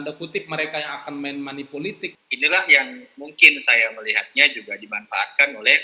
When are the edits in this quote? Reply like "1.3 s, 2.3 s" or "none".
2.1 s

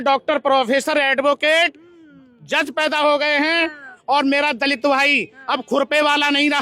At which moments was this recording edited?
3.9 s

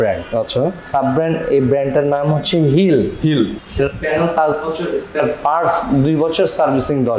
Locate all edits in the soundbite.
3.5 s

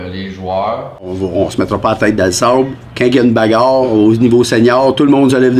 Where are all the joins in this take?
1.2 s

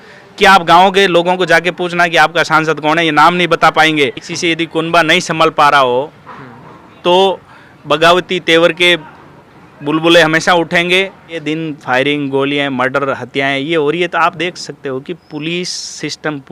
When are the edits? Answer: 4.3 s, 11.4 s

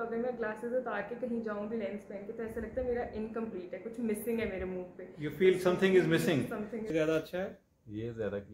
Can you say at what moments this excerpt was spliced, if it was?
6.9 s

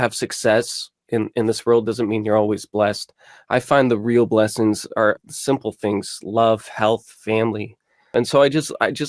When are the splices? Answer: 5.2 s, 8.1 s

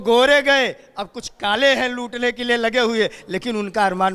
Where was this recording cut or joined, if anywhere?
none

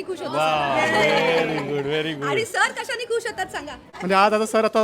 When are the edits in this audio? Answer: 3.9 s

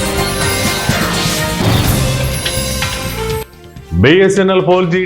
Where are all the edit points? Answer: 3.4 s

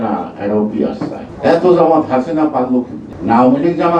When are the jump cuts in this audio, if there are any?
1.3 s, 3.1 s

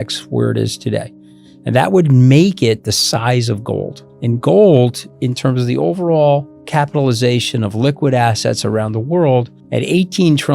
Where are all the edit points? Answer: 4.0 s, 5.1 s

